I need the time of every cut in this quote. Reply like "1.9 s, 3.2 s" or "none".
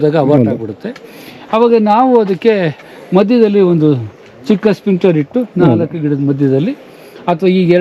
none